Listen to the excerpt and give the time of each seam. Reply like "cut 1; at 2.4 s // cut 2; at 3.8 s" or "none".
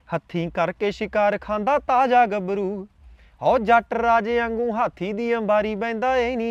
none